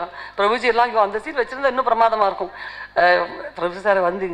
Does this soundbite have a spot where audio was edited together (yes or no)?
yes